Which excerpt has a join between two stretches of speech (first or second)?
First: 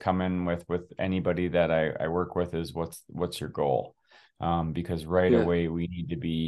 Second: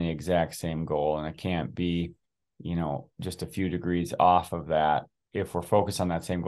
second